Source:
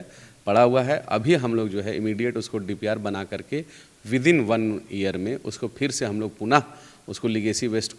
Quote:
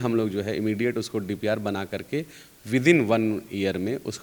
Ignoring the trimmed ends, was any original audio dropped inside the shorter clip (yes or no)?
no